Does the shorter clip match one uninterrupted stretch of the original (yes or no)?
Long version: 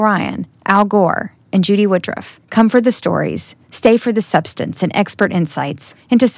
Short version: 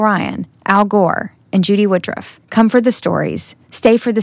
yes